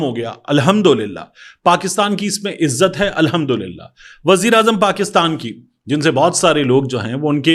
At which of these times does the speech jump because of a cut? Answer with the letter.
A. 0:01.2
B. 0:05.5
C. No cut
C